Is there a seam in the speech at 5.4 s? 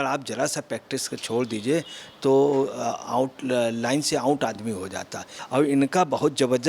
yes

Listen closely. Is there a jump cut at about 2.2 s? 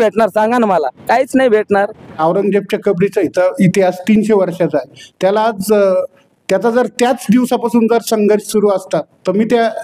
yes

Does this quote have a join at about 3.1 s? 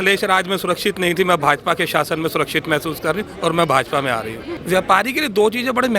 no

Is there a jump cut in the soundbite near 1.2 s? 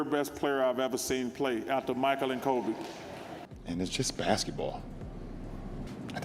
no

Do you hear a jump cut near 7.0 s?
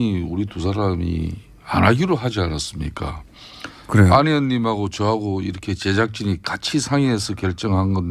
no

